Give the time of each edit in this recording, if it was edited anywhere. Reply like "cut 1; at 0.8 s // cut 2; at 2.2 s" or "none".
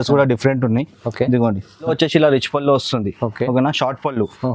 cut 1; at 1.9 s